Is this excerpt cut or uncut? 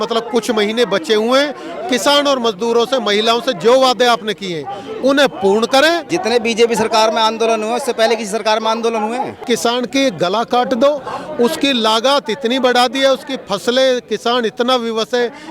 cut